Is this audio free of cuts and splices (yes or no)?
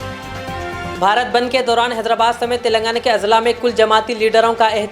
no